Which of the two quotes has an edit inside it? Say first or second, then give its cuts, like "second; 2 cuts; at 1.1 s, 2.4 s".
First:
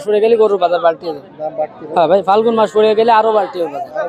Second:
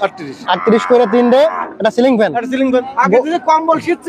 second; 1 cut; at 2.7 s